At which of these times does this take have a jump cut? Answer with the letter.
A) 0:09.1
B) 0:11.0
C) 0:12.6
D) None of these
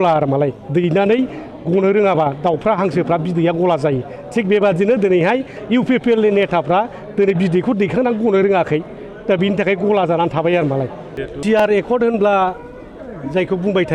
B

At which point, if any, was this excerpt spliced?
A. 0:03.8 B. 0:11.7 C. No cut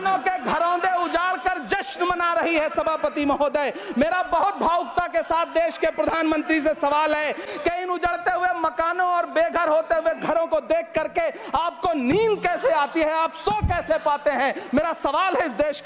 C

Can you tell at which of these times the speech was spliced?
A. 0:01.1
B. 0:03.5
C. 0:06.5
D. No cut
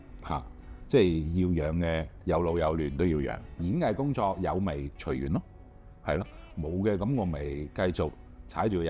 B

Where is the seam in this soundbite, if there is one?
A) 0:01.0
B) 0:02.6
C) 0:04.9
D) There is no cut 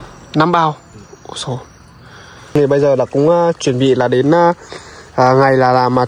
B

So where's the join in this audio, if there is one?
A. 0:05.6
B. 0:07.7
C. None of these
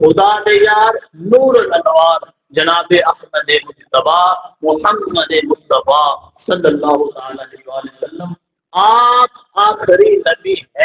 C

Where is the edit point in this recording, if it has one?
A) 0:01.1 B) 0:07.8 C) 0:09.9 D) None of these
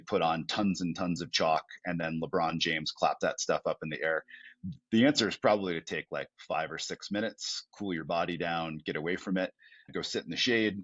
C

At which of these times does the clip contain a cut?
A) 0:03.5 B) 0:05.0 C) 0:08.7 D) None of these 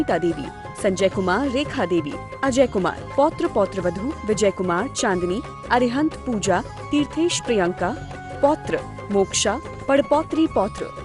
D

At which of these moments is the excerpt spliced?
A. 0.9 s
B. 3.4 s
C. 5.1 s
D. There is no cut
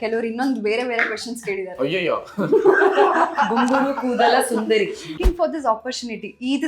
C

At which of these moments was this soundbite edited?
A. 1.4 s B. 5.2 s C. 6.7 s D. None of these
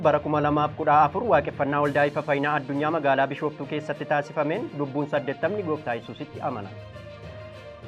C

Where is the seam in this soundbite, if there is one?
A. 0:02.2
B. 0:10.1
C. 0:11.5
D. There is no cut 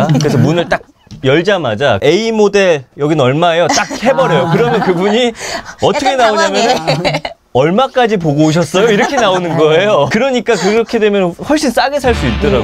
B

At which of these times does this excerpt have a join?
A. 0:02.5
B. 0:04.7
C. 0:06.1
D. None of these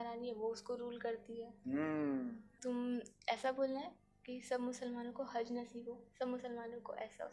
A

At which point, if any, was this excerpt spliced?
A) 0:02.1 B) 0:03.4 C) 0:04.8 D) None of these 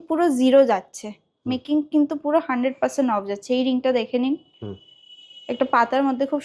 D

